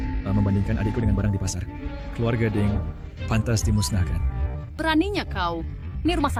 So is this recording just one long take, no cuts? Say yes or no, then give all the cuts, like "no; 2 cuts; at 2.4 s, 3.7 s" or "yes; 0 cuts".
yes; 0 cuts